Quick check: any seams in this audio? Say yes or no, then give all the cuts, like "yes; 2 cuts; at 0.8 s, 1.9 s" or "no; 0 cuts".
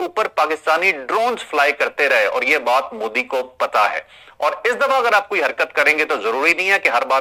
no; 0 cuts